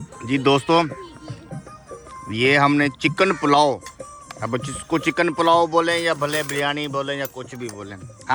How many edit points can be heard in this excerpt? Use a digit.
0